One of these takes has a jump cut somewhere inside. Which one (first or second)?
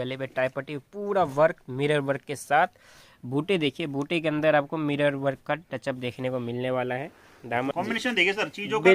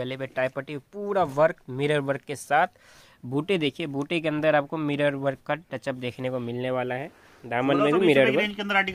first